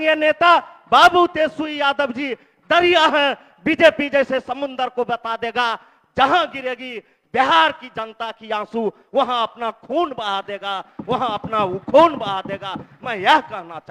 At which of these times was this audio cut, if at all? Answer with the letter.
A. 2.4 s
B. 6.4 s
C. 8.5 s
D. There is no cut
D